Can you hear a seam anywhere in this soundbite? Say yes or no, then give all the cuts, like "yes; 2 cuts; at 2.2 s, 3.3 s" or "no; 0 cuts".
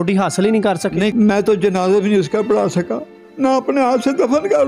no; 0 cuts